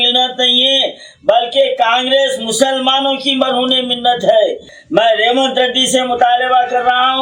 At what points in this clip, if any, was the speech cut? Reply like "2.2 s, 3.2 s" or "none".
4.7 s